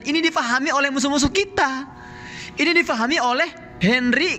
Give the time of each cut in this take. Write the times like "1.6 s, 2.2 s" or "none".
none